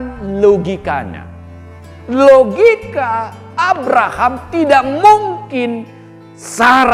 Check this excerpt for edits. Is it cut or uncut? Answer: uncut